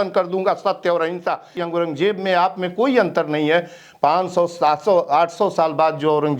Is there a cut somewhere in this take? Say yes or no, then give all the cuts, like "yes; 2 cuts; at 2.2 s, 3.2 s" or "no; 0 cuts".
yes; 1 cut; at 1.5 s